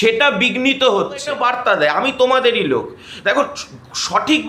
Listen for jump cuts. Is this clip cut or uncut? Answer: cut